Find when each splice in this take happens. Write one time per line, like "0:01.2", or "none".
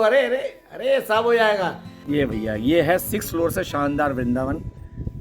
0:01.9